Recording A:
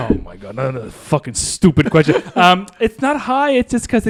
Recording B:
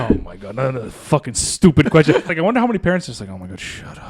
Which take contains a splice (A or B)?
B